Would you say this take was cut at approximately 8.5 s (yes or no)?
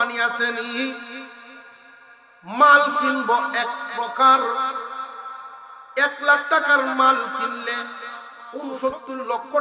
yes